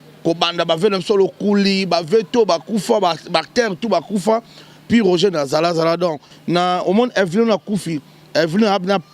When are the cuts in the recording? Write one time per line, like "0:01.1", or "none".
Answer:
0:06.2

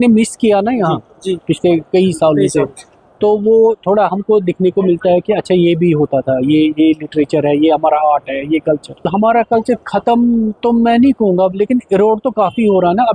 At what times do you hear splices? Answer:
0:09.1

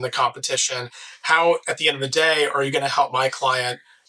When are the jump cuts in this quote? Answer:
none

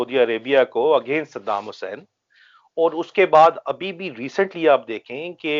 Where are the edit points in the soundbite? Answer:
none

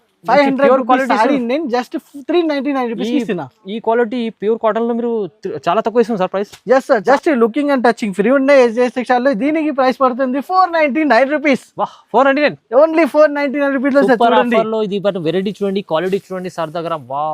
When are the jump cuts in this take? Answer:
0:07.0

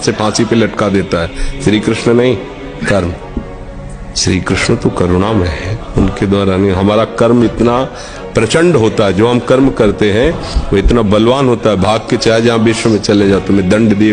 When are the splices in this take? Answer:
none

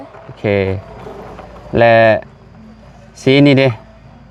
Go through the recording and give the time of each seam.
none

